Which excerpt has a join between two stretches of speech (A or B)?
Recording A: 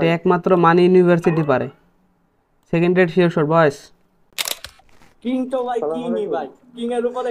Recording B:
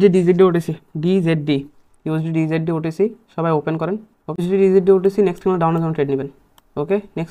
B